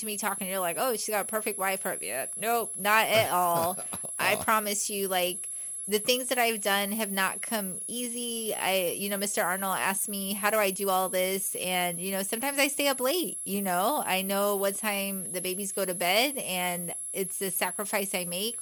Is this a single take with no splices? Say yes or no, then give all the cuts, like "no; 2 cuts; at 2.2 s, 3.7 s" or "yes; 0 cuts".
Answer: yes; 0 cuts